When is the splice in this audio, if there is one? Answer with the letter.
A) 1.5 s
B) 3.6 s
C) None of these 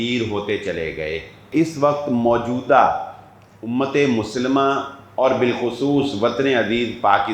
A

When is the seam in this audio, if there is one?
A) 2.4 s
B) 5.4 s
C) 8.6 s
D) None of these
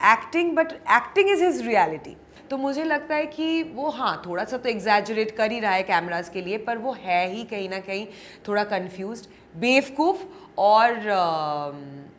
A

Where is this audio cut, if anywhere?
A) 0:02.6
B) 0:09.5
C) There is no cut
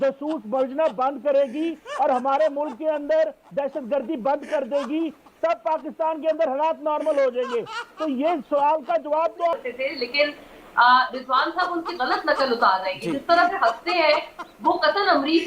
B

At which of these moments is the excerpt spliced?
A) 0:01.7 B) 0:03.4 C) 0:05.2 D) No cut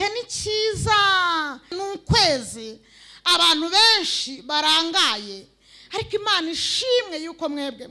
A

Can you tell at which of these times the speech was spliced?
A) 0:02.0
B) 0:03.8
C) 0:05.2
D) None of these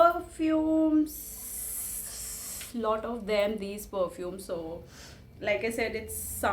D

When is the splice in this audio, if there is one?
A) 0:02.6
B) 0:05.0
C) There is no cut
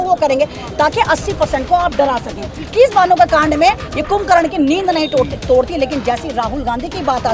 A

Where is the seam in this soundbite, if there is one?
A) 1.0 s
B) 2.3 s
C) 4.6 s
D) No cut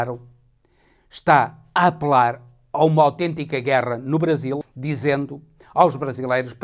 C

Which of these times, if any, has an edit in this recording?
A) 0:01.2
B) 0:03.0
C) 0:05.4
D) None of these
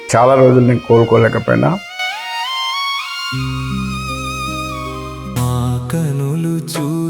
C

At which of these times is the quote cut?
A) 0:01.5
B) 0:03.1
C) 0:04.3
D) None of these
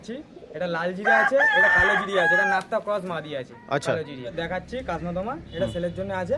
C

